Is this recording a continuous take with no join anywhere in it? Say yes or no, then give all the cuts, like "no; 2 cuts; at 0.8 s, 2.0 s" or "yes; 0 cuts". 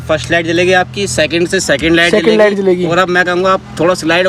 yes; 0 cuts